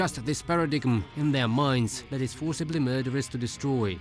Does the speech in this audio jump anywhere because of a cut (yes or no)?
yes